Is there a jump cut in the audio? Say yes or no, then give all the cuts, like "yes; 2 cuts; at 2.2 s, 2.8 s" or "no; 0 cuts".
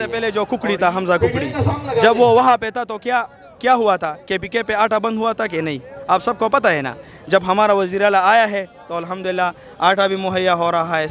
no; 0 cuts